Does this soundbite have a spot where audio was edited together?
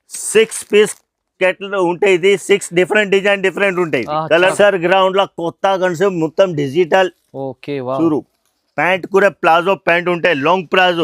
yes; 1 cut; at 4.5 s

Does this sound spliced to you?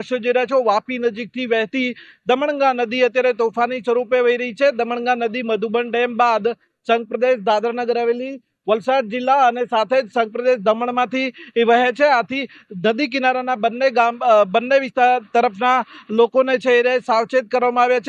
yes; 1 cut; at 15.2 s

